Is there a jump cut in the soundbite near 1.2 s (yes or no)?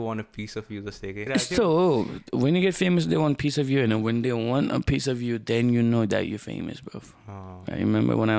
yes